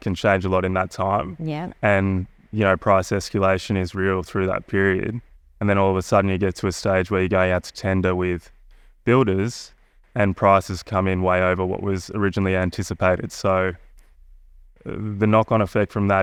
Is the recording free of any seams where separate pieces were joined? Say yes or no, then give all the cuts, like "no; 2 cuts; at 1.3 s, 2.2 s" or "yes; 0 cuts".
yes; 0 cuts